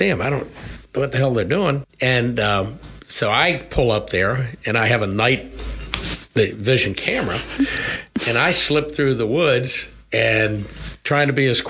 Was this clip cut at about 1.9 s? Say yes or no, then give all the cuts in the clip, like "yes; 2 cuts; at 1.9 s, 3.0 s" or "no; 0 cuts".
yes; 1 cut; at 1.9 s